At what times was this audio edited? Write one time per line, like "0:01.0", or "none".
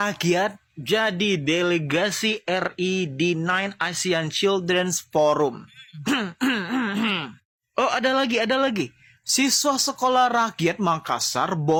none